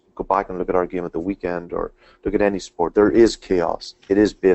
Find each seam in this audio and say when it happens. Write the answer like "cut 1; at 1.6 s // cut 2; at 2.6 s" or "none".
cut 1; at 2.9 s